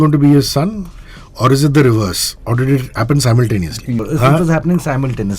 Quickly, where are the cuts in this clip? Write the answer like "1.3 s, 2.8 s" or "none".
4.0 s